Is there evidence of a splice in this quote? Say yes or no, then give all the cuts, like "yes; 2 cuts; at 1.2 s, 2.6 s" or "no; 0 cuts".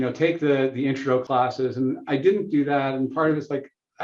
yes; 1 cut; at 1.2 s